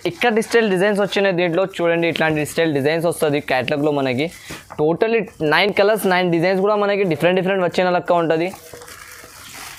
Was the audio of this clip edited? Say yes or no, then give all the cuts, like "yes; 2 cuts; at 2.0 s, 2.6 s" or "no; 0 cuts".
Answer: no; 0 cuts